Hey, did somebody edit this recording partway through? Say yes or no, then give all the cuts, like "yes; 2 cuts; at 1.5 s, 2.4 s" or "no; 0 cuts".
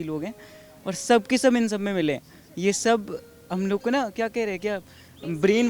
no; 0 cuts